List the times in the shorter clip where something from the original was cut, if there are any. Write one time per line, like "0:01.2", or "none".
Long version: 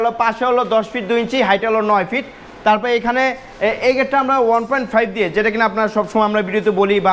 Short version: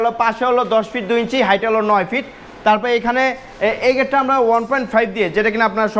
none